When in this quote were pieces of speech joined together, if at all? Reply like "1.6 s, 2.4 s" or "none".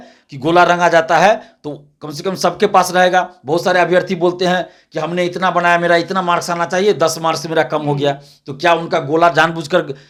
none